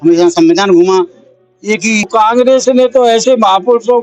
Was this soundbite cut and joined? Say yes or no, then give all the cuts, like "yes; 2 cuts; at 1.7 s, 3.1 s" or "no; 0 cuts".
yes; 1 cut; at 2.1 s